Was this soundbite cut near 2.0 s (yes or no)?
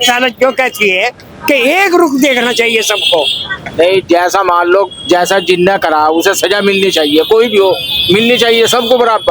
no